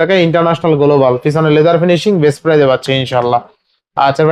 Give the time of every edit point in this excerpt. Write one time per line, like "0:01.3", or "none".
none